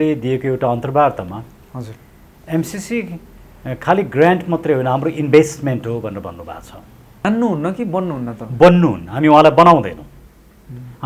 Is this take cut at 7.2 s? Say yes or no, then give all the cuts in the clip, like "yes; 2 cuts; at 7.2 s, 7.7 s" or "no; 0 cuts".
yes; 1 cut; at 7.2 s